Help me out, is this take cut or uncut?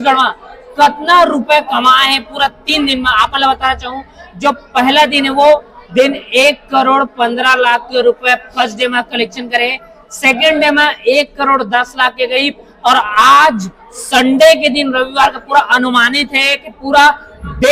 uncut